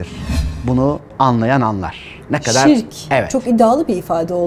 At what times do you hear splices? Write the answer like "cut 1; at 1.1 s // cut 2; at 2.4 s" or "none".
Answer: cut 1; at 1.1 s